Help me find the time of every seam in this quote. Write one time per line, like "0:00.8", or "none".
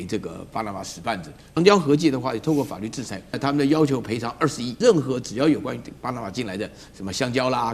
0:01.5
0:03.4
0:04.8